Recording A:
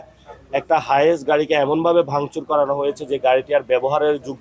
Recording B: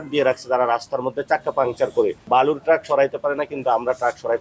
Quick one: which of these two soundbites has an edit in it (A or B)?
B